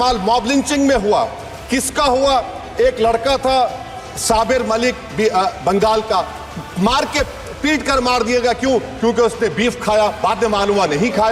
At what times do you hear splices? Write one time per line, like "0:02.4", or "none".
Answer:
none